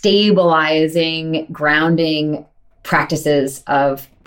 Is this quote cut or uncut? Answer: uncut